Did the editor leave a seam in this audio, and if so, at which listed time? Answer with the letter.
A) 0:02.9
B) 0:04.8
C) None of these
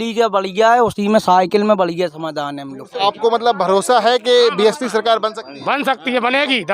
A